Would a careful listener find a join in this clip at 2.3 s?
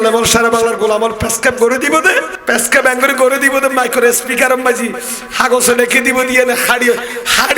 yes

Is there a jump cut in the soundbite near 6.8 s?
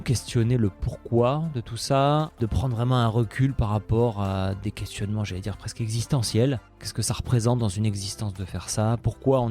yes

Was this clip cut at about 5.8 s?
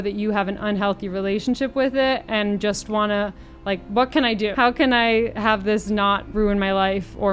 no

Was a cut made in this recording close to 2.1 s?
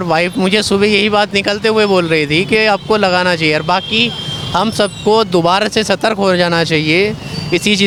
no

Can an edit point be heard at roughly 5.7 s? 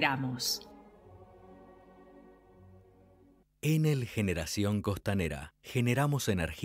no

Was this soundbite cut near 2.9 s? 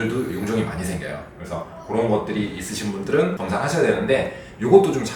no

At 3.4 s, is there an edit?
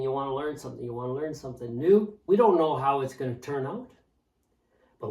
no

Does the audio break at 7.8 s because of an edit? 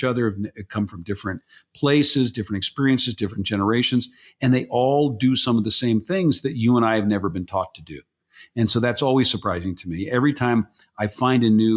no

